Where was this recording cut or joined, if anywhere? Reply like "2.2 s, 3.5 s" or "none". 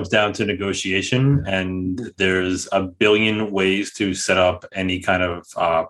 none